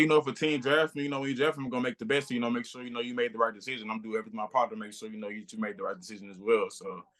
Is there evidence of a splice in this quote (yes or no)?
no